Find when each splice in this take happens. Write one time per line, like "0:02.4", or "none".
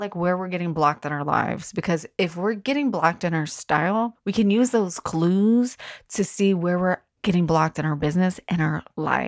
0:04.2
0:07.1

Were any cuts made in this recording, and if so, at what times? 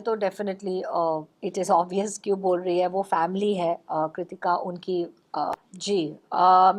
0:05.5

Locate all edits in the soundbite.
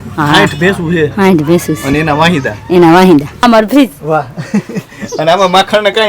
0:03.4

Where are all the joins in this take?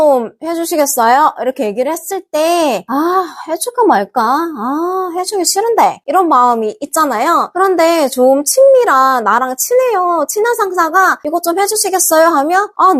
none

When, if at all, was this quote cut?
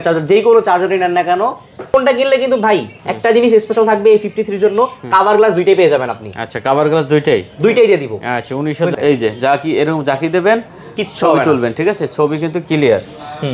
0:01.9
0:08.9

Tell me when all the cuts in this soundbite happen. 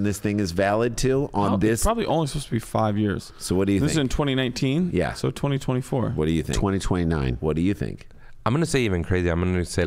none

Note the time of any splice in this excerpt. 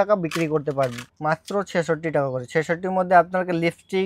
0:01.1

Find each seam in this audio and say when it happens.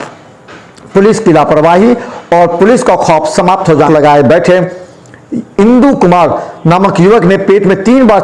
0:03.9

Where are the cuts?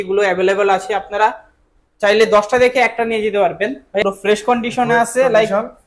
0:04.0

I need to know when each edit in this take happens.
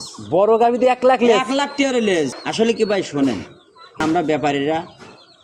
0:02.3
0:04.0

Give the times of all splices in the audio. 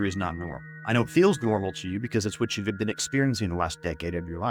none

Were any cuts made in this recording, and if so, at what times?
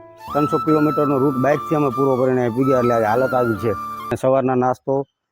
0:04.1

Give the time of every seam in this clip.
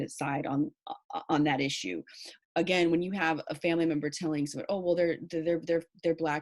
0:02.3

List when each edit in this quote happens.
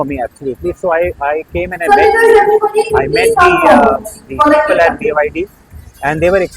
none

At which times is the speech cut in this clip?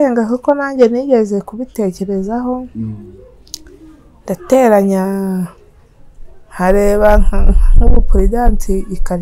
none

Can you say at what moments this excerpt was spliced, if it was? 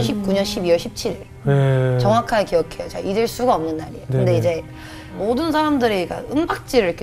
0:05.2

